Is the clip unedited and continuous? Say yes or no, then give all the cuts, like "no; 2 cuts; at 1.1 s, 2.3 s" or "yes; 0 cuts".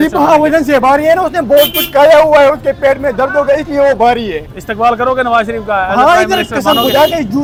yes; 0 cuts